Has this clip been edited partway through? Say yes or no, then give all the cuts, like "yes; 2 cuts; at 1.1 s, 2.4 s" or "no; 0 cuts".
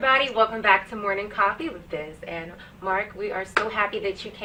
no; 0 cuts